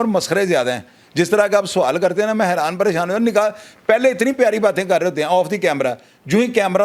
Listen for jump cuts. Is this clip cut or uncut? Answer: uncut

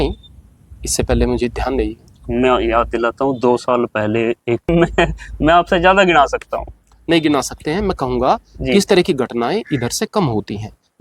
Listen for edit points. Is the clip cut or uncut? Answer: cut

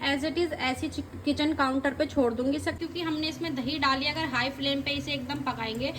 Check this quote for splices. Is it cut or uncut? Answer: cut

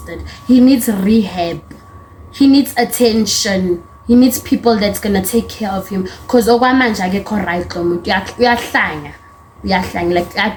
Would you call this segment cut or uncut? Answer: uncut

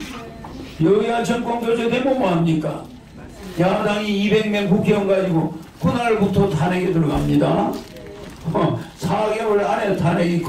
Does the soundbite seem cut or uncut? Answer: uncut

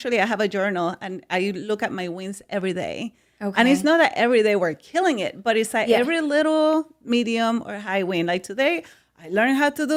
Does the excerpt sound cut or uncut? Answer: uncut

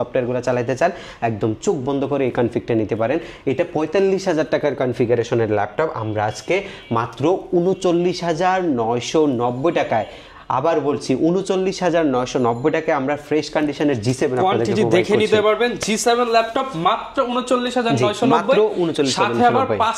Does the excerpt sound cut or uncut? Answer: uncut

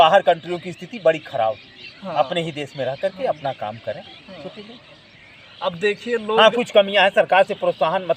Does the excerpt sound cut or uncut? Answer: uncut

